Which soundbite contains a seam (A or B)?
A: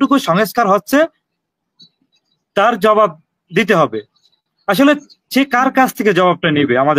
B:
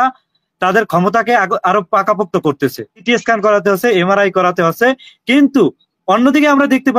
B